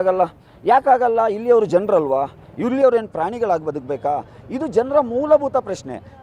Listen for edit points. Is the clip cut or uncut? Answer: uncut